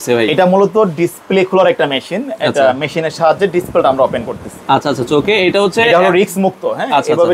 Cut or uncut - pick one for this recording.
uncut